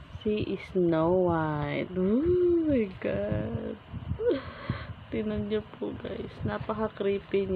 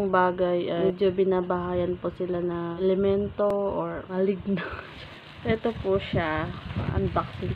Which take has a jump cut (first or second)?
second